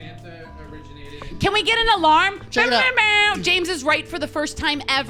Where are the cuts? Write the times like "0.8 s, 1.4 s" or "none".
none